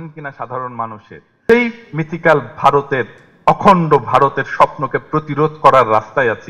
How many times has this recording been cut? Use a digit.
1